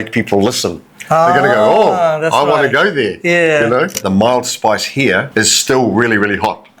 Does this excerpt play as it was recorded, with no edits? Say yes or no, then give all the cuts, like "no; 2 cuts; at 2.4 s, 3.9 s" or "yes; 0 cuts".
no; 2 cuts; at 4.0 s, 5.3 s